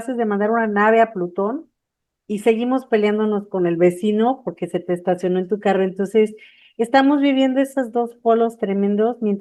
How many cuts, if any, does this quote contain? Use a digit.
0